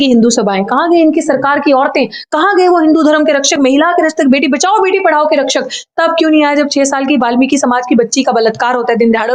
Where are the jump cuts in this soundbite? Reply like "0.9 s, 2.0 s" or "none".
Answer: none